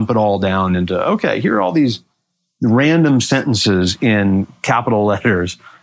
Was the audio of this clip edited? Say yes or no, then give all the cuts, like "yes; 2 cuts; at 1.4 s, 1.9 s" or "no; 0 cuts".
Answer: no; 0 cuts